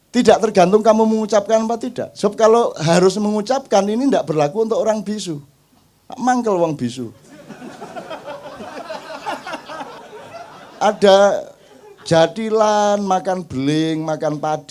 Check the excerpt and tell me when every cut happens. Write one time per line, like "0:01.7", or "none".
0:10.0